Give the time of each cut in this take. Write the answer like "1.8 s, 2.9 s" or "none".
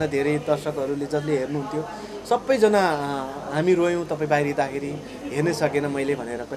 none